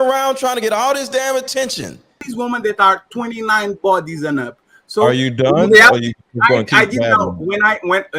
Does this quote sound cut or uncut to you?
cut